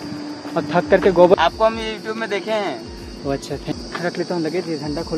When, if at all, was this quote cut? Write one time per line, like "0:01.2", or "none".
0:01.3
0:03.7